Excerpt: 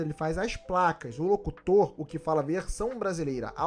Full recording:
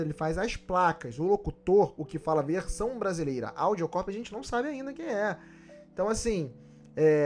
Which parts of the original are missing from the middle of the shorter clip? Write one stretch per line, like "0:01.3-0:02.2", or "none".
none